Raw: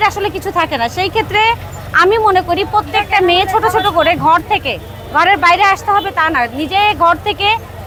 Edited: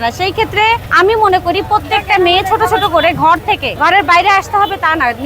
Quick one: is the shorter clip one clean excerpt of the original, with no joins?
no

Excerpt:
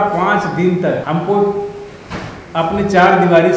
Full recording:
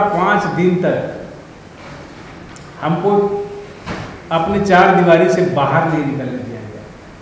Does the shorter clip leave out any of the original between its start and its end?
yes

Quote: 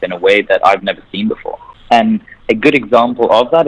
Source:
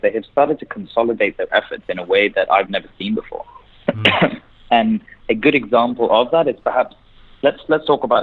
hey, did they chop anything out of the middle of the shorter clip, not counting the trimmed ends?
yes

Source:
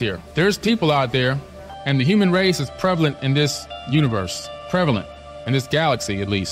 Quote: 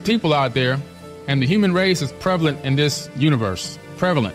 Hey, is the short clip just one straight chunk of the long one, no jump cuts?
no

